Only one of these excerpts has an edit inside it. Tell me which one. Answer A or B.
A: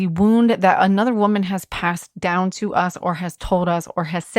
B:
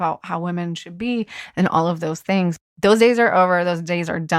B